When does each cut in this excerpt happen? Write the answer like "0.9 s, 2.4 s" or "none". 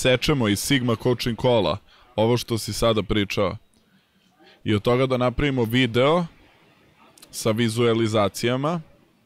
none